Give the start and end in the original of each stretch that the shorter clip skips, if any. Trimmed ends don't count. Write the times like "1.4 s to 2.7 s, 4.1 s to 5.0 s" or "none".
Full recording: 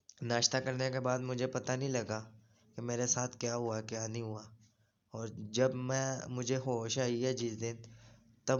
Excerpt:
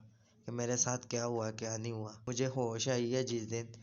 4.5 s to 6.3 s